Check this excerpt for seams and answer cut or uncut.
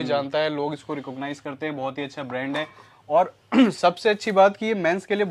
uncut